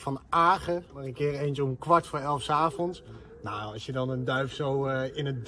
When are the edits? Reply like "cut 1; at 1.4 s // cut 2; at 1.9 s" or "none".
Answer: cut 1; at 1.0 s